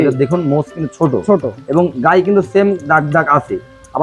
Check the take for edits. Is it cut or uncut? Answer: uncut